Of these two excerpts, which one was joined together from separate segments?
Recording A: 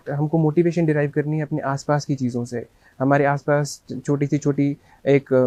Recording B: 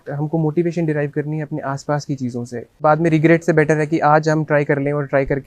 B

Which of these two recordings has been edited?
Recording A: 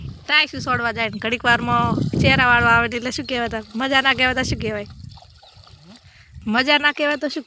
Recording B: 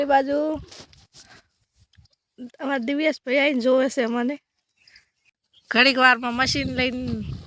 B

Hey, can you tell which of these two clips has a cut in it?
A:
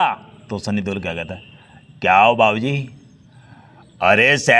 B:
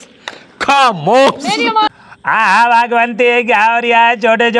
B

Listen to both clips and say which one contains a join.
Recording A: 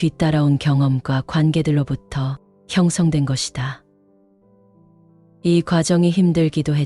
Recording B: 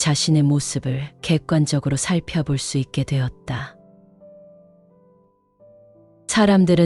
A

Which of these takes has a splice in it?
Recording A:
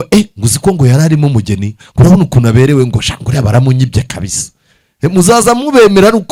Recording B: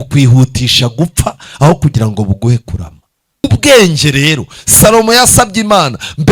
B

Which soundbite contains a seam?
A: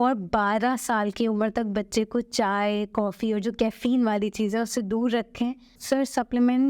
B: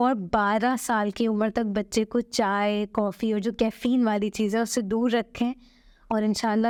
A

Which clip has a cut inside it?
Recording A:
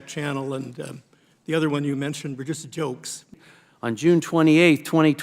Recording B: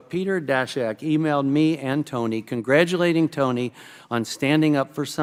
A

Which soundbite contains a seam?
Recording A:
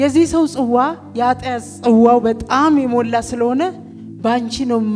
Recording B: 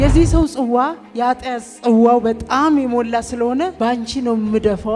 B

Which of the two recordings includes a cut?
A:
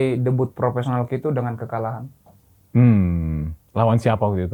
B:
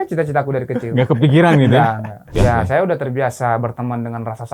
B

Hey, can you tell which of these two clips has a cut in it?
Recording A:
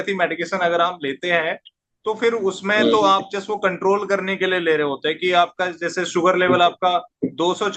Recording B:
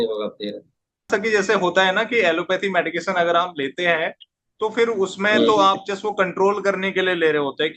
B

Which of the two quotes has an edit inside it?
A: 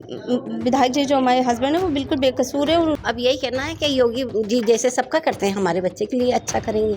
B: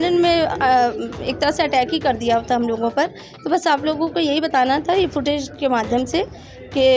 A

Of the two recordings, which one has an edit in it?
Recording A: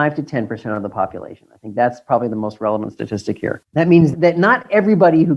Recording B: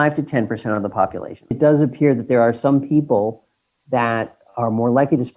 B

